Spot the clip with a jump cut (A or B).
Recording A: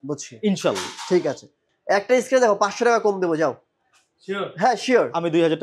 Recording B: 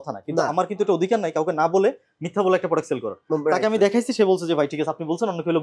A